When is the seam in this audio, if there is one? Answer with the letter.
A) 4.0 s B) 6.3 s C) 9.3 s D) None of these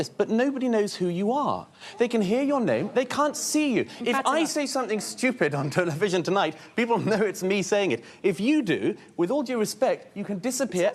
D